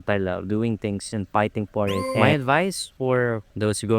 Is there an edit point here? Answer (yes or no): yes